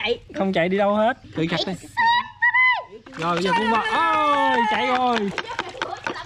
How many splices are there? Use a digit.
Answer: 1